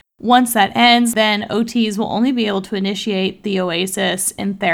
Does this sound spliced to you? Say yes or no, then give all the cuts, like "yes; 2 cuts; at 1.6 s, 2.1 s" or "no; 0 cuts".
yes; 1 cut; at 1.1 s